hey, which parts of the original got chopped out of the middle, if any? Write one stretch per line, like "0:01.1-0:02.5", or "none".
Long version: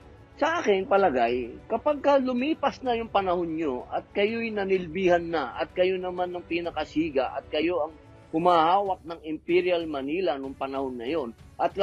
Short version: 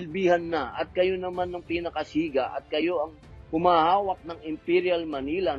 none